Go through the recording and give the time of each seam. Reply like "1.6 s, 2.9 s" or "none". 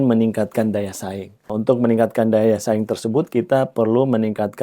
1.5 s